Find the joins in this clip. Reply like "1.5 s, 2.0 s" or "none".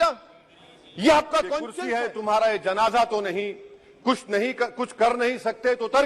1.7 s